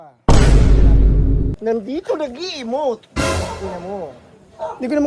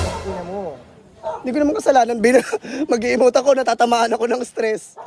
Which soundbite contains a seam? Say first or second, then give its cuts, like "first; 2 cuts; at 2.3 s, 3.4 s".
first; 1 cut; at 1.5 s